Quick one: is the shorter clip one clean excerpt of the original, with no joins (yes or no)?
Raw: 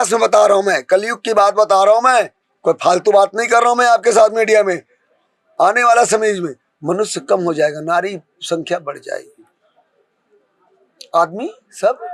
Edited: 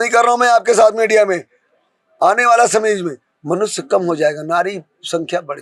yes